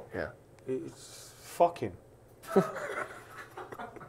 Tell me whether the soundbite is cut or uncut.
uncut